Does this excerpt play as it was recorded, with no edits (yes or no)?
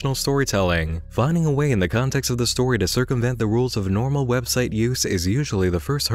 no